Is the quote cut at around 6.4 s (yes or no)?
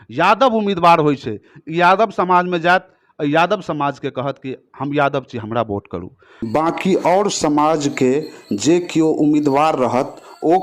yes